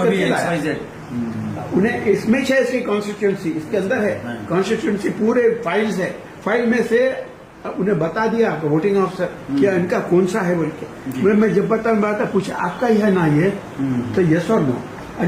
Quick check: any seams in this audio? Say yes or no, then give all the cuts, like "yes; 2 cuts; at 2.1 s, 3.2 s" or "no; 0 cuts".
no; 0 cuts